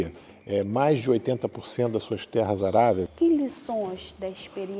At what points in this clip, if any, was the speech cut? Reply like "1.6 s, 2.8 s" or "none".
3.1 s